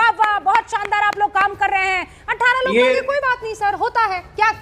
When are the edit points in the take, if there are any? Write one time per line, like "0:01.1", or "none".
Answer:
none